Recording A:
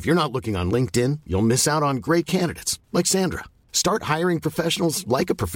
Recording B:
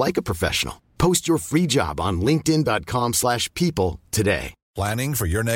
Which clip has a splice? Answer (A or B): B